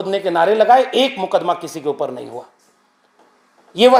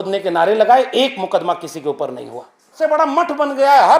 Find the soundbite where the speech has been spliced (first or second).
second